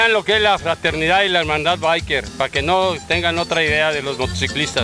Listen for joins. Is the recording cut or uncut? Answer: cut